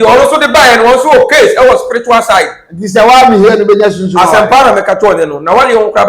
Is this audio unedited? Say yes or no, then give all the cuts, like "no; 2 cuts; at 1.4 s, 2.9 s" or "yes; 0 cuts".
yes; 0 cuts